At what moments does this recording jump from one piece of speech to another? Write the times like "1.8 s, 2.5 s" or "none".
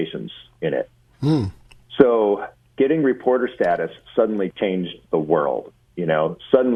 none